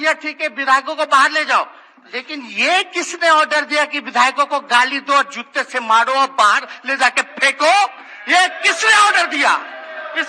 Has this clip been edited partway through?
no; 0 cuts

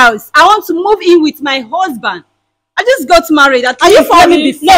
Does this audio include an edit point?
no; 0 cuts

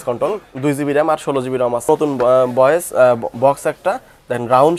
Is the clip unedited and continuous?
no; 1 cut; at 1.9 s

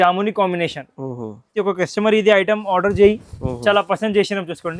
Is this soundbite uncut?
no; 1 cut; at 1.6 s

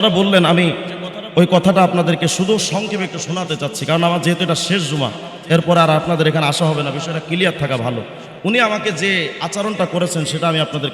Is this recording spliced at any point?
no; 0 cuts

